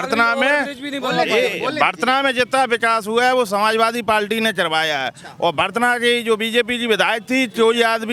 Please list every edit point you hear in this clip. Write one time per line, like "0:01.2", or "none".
none